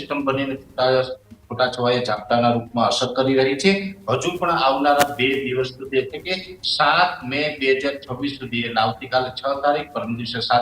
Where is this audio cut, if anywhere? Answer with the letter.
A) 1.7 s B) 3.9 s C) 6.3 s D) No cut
D